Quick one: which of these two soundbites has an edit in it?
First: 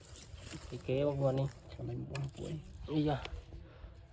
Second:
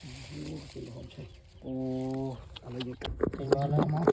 second; 1 cut; at 3.0 s

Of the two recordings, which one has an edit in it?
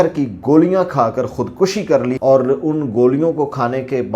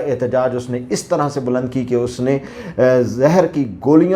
first; 1 cut; at 2.2 s

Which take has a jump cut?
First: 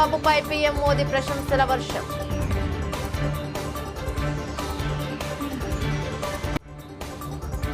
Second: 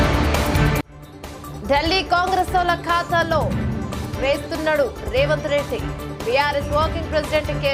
first; 2 cuts; at 5.6 s, 6.9 s

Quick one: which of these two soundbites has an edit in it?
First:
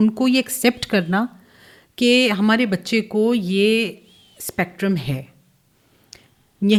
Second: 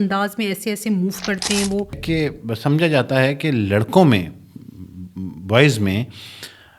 second; 1 cut; at 2.0 s

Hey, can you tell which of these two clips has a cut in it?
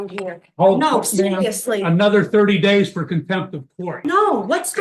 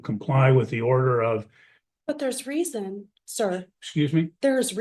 first; 1 cut; at 3.9 s

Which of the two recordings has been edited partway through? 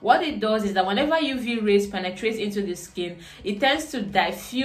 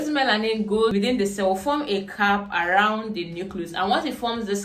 second; 1 cut; at 0.9 s

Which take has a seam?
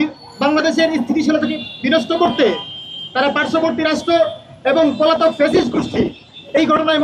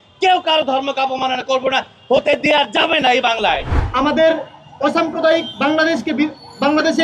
second; 1 cut; at 3.7 s

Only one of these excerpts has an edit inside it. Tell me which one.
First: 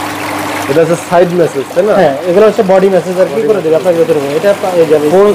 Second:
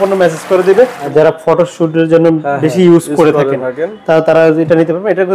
second; 1 cut; at 1.1 s

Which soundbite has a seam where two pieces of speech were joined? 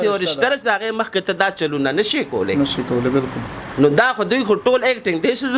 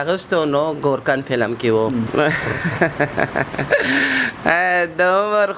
second; 1 cut; at 2.1 s

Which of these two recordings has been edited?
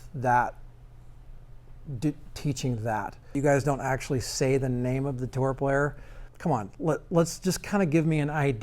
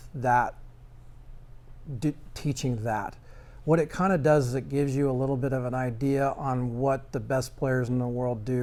first; 2 cuts; at 3.4 s, 6.3 s

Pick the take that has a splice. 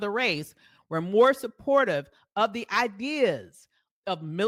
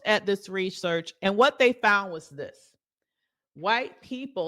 second; 1 cut; at 1.1 s

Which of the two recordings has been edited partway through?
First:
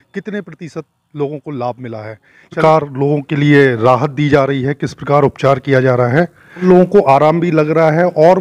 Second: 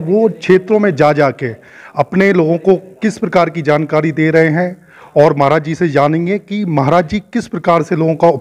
first; 2 cuts; at 2.6 s, 6.6 s

